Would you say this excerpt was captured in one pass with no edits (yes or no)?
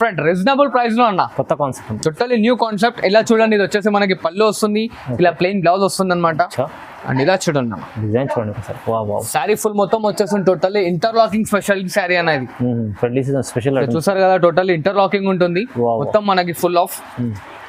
yes